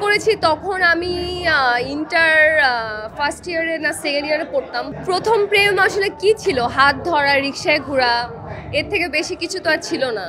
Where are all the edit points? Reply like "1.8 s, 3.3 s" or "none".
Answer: none